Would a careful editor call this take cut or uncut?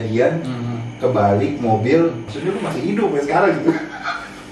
cut